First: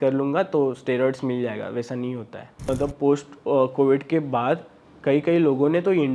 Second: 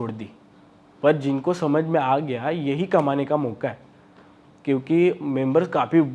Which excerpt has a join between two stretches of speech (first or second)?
first